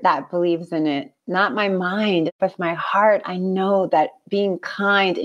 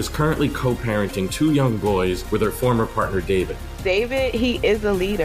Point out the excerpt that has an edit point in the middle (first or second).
first